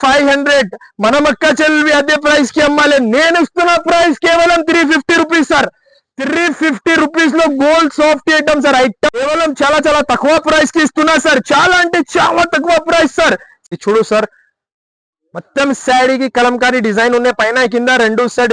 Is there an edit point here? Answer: yes; 2 cuts; at 9.1 s, 13.5 s

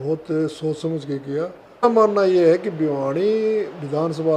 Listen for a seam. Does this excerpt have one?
yes; 1 cut; at 1.8 s

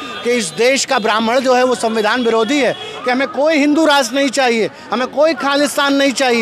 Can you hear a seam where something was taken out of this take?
yes; 1 cut; at 2.9 s

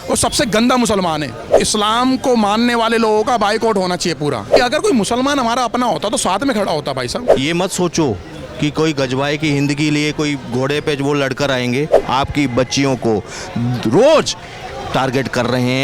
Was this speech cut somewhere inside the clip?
yes; 4 cuts; at 1.6 s, 4.6 s, 7.3 s, 12.0 s

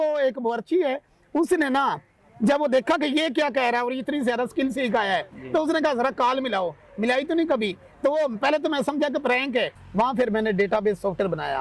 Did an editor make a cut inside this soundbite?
yes; 1 cut; at 9.8 s

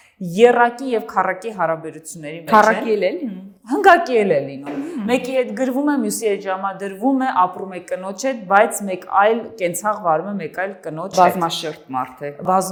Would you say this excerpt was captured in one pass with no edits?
yes; 0 cuts

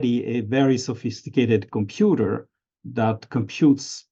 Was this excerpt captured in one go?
yes; 0 cuts

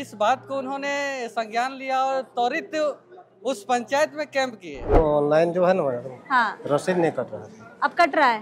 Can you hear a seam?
yes; 1 cut; at 5.0 s

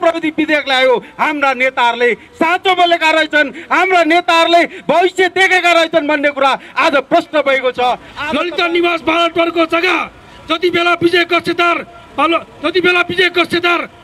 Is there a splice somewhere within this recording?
yes; 1 cut; at 8.1 s

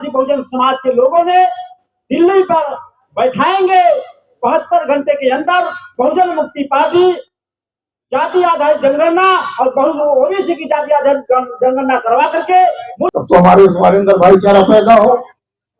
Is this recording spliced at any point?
yes; 1 cut; at 12.9 s

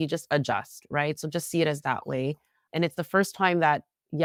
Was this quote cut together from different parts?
no; 0 cuts

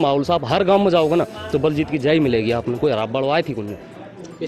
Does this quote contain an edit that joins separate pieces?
no; 0 cuts

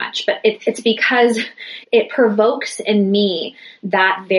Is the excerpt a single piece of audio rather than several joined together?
no; 1 cut; at 1.8 s

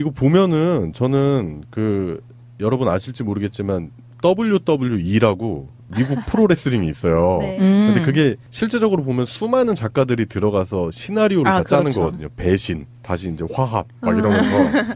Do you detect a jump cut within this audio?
no; 0 cuts

